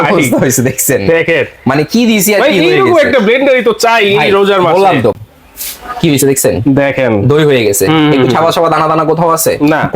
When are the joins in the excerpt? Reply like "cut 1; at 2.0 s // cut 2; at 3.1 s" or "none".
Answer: cut 1; at 5.2 s